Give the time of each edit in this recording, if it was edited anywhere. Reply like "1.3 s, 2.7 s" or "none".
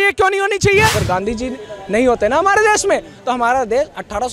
1.0 s